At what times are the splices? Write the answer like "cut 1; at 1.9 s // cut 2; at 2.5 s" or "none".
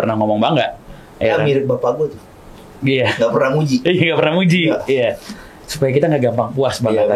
none

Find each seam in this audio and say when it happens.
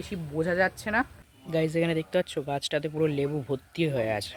none

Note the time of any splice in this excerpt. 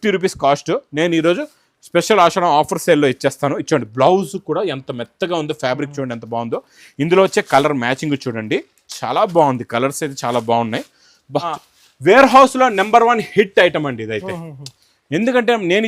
cut 1; at 11.5 s

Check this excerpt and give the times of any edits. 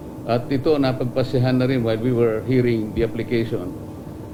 none

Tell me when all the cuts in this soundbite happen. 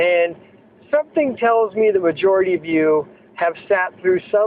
none

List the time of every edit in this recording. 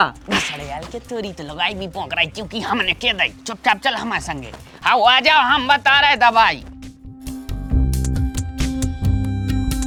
none

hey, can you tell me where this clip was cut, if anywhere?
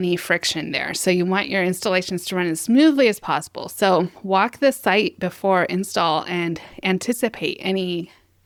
none

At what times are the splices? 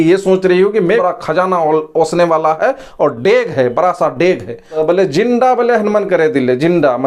cut 1; at 1.0 s // cut 2; at 4.8 s

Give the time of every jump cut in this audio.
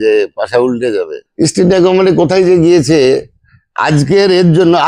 cut 1; at 1.2 s

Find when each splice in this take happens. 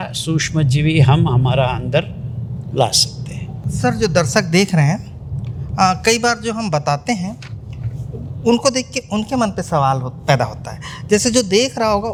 none

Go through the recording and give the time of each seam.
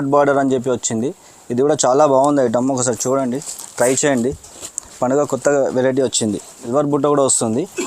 cut 1; at 6.6 s

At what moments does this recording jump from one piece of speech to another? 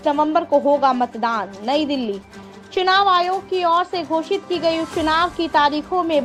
none

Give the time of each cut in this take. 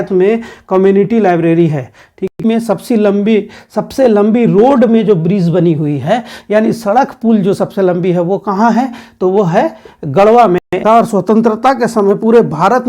cut 1; at 2.3 s // cut 2; at 10.8 s

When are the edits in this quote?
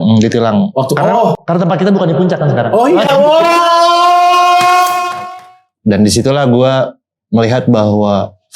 cut 1; at 5.2 s

